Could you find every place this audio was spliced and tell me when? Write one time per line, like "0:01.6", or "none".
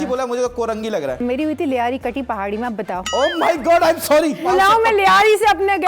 0:01.2
0:03.0
0:04.4